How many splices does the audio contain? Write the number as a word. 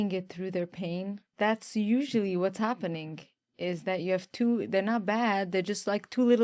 one